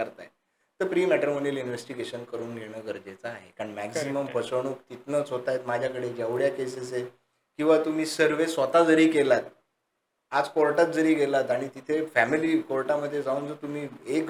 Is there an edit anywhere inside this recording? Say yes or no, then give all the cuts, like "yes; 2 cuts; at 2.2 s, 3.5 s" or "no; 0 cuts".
no; 0 cuts